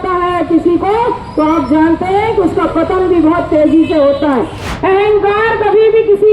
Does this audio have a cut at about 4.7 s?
yes; 1 cut; at 4.7 s

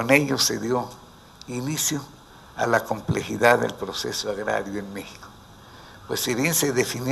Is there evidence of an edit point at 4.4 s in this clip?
yes; 1 cut; at 4.4 s

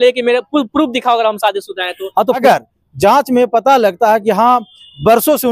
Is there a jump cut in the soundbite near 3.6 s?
no; 1 cut; at 2.4 s

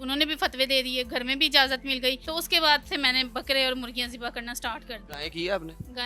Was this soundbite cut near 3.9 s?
no; 2 cuts; at 2.2 s, 5.1 s

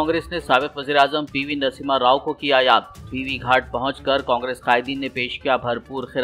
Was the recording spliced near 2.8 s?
no; 0 cuts

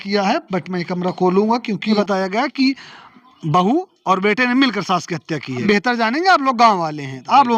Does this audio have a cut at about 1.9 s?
yes; 2 cuts; at 1.9 s, 5.6 s

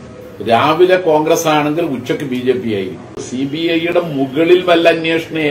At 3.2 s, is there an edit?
yes; 1 cut; at 3.2 s

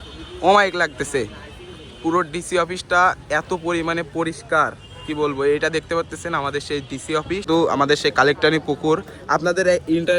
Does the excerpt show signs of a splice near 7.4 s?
yes; 1 cut; at 7.4 s

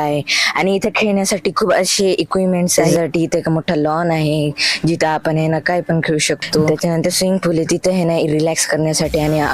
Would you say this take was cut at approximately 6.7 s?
yes; 2 cuts; at 2.8 s, 6.7 s

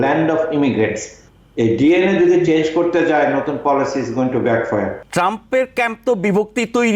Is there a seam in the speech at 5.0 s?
yes; 1 cut; at 5.0 s

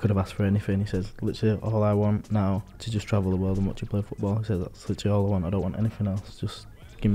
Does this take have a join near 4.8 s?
no; 1 cut; at 2.8 s

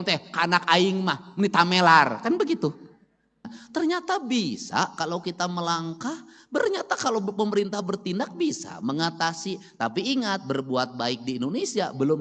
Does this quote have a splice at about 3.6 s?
yes; 1 cut; at 3.6 s

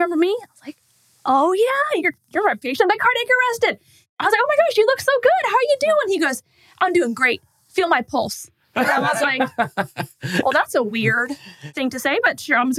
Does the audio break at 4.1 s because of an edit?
yes; 2 cuts; at 4.1 s, 11.7 s

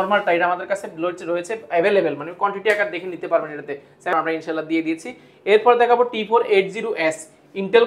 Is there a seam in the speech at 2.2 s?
no; 1 cut; at 4.1 s

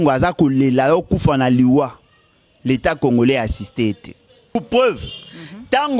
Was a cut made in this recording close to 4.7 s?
yes; 1 cut; at 4.7 s

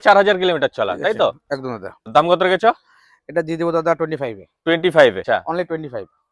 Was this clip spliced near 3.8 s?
no; 2 cuts; at 2.1 s, 5.2 s

